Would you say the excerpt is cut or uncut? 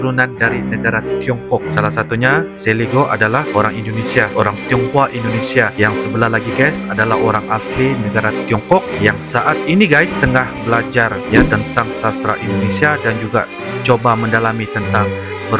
uncut